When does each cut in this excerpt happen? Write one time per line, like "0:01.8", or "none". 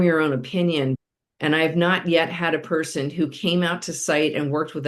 0:01.0